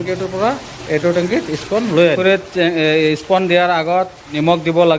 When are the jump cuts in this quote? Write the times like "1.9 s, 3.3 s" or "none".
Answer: 2.2 s